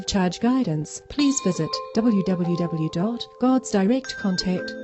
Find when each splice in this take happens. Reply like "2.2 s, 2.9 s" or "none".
1.8 s